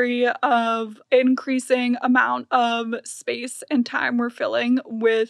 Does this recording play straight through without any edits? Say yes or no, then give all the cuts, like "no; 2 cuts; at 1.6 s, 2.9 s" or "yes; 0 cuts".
no; 1 cut; at 1.0 s